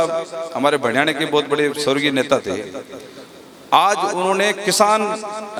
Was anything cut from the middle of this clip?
no; 0 cuts

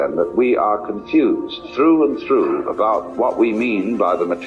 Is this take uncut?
no; 2 cuts; at 1.6 s, 3.0 s

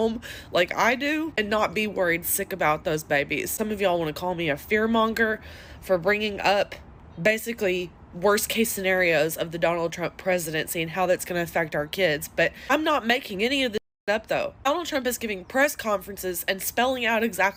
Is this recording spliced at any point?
no; 0 cuts

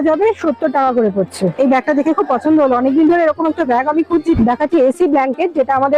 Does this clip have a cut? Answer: yes; 2 cuts; at 1.5 s, 4.4 s

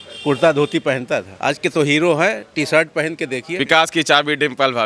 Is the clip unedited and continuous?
no; 2 cuts; at 1.3 s, 3.5 s

